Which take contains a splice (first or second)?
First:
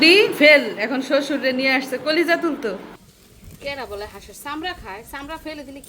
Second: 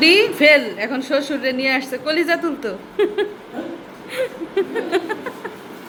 first